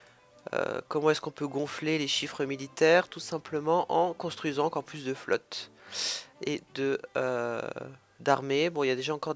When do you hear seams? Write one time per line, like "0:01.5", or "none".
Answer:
0:07.5